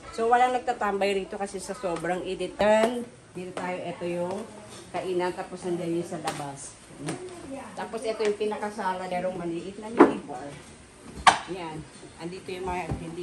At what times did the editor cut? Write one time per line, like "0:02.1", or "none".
0:02.6
0:09.1